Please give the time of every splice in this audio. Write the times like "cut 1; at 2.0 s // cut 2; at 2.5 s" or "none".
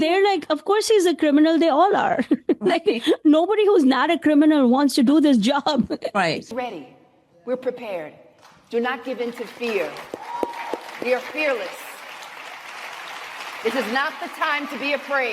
cut 1; at 6.5 s